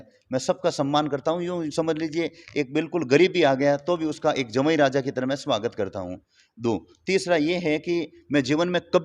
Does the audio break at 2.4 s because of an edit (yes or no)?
no